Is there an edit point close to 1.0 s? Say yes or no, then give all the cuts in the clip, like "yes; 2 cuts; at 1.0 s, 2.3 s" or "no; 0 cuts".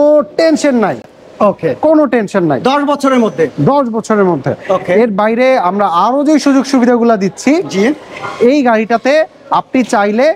no; 0 cuts